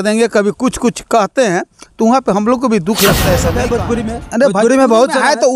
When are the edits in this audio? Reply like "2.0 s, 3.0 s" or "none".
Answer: 3.5 s